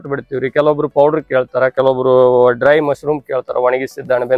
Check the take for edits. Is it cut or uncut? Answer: uncut